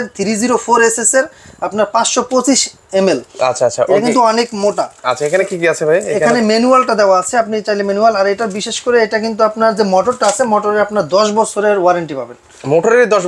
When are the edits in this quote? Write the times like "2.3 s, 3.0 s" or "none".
none